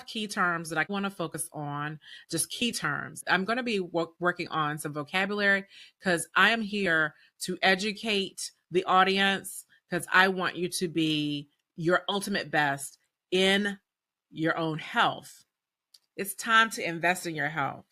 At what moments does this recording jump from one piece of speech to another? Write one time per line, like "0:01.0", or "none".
0:00.9
0:03.2